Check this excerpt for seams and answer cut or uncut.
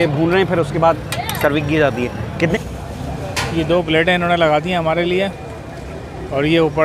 cut